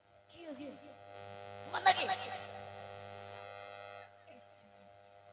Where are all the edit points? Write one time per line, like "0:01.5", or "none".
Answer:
0:04.1